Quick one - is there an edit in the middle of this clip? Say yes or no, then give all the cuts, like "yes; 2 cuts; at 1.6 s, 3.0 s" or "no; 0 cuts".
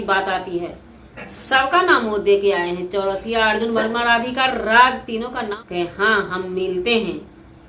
yes; 1 cut; at 5.6 s